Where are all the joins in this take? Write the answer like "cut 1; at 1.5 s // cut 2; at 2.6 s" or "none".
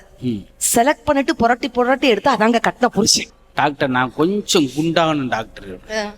cut 1; at 3.4 s